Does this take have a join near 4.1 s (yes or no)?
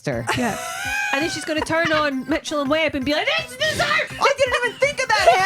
yes